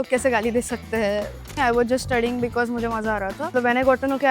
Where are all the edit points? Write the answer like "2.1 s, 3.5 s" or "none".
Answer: 1.4 s, 3.5 s